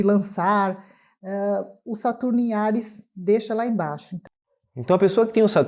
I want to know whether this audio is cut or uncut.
cut